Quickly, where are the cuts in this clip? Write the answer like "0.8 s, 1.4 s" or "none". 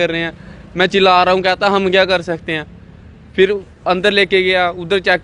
none